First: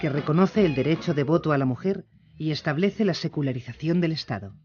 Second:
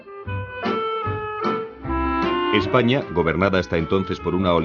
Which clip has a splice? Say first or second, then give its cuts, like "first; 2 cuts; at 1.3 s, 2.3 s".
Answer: second; 1 cut; at 3.6 s